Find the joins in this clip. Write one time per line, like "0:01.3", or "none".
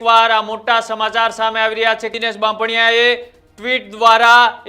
0:02.2